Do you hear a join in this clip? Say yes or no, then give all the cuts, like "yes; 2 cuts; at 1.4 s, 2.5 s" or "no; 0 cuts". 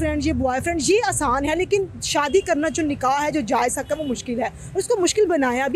no; 0 cuts